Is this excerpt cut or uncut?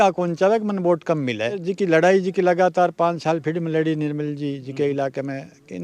cut